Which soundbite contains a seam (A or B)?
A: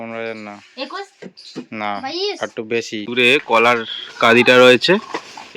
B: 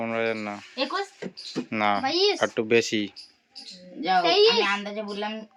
A